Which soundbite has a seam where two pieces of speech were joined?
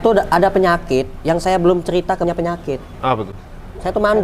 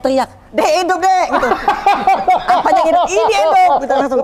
first; 1 cut; at 2.2 s

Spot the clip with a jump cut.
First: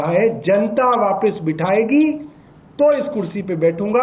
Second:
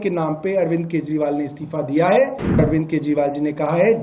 second; 1 cut; at 2.6 s

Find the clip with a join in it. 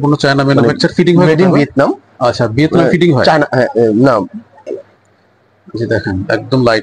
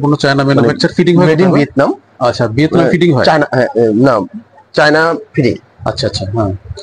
first; 1 cut; at 4.7 s

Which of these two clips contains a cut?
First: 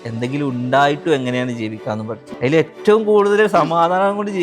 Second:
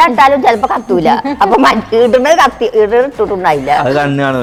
first; 1 cut; at 2.2 s

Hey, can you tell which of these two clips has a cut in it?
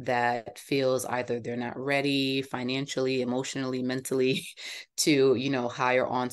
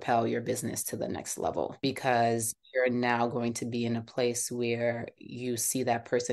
second; 1 cut; at 1.8 s

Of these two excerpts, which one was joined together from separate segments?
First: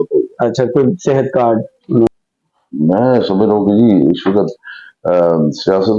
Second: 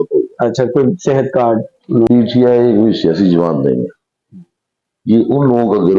second; 1 cut; at 2.1 s

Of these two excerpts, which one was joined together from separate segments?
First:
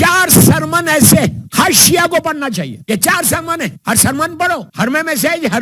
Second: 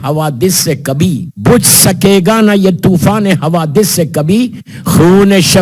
first; 4 cuts; at 1.4 s, 2.8 s, 3.8 s, 4.7 s

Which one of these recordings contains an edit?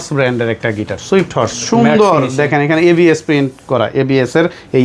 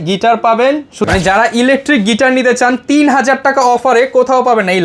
second; 1 cut; at 1.0 s

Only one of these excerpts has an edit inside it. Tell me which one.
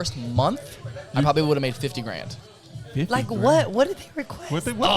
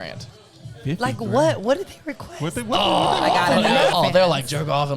second; 1 cut; at 3.9 s

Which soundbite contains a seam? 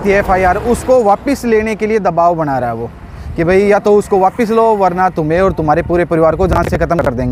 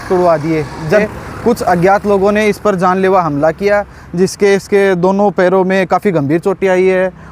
second; 1 cut; at 1.0 s

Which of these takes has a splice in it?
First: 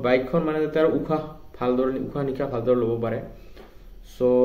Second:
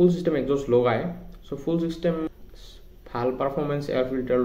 second; 1 cut; at 2.3 s

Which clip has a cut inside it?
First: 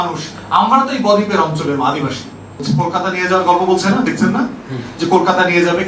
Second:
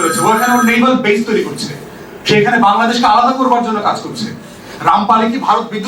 first; 1 cut; at 2.6 s

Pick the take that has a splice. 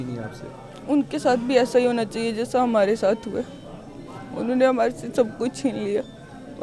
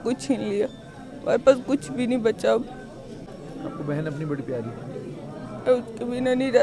second; 1 cut; at 3.3 s

